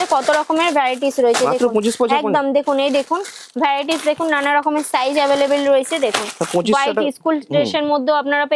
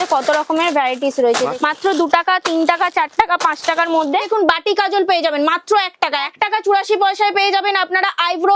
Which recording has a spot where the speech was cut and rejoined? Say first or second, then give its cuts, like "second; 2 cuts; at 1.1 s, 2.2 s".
second; 3 cuts; at 1.5 s, 4.3 s, 6.3 s